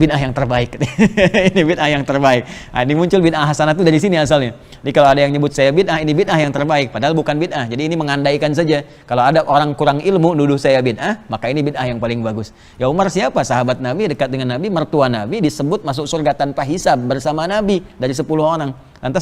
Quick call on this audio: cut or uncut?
uncut